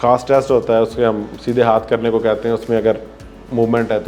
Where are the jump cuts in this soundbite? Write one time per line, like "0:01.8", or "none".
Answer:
none